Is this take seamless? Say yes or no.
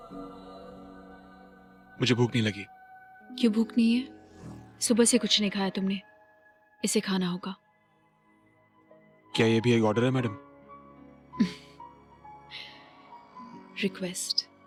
yes